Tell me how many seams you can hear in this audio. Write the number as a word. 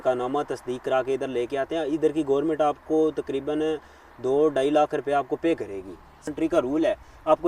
one